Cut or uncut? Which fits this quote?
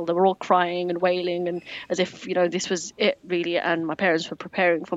cut